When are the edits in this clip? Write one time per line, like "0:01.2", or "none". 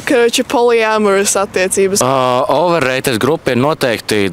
0:02.0

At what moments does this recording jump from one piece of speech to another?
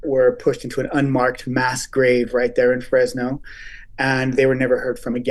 none

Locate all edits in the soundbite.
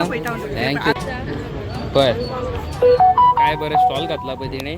0:01.0

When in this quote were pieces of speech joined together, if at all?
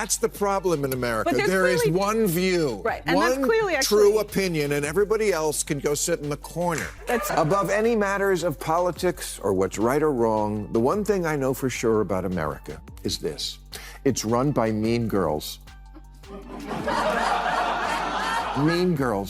0:07.3

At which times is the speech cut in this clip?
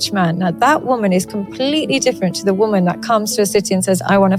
none

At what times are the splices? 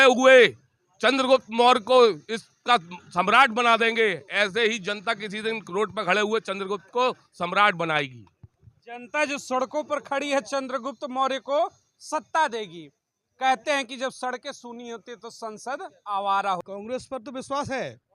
0:16.6

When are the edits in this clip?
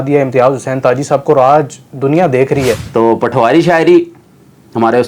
0:02.8

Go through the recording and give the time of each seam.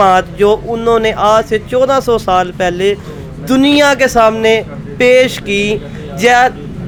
none

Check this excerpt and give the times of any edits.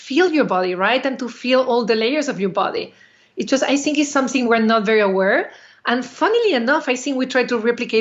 none

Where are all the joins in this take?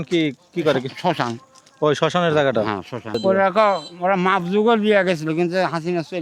0:03.2

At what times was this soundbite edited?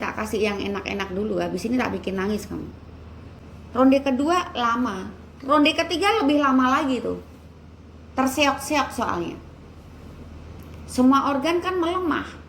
0:02.9

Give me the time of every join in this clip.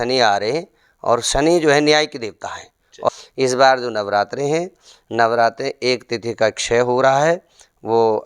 0:03.1

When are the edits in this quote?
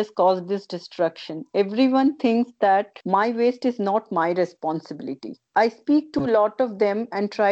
0:03.0

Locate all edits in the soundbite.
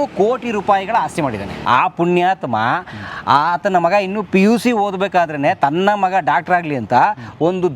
0:01.5

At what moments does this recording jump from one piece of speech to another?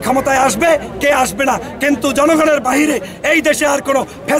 none

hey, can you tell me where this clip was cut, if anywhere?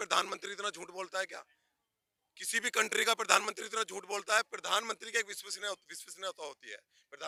none

